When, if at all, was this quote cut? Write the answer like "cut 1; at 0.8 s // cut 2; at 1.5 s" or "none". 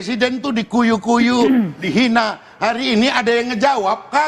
none